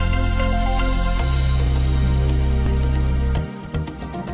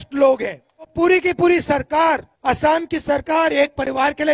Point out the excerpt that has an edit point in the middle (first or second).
second